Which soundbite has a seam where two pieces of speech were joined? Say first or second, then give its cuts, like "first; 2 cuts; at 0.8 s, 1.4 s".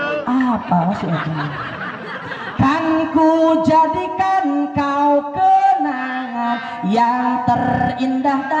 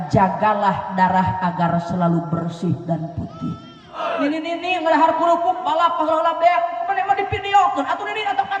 second; 1 cut; at 4.0 s